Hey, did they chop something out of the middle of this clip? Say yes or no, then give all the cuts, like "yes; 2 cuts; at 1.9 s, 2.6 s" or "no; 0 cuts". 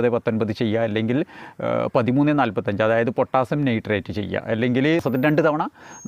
yes; 1 cut; at 5.0 s